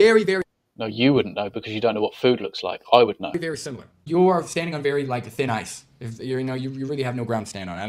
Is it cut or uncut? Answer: cut